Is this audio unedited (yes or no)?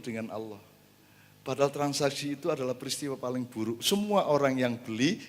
yes